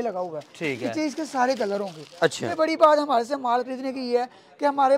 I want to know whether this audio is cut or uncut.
cut